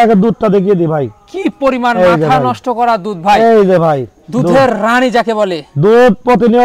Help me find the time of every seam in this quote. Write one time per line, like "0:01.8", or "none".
none